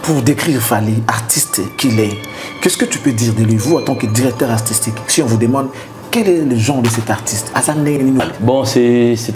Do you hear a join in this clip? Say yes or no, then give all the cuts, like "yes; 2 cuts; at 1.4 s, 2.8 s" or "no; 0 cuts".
yes; 1 cut; at 8.2 s